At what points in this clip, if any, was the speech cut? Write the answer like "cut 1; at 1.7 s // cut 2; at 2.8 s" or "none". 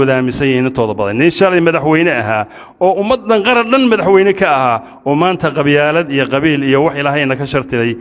none